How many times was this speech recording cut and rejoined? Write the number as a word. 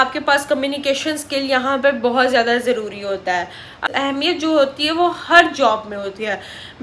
one